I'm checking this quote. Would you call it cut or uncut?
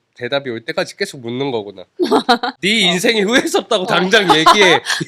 cut